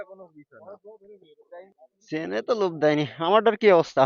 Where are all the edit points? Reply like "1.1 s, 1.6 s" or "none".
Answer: 1.7 s